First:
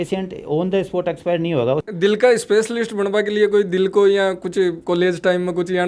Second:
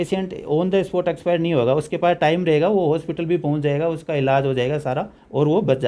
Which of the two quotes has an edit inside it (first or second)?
first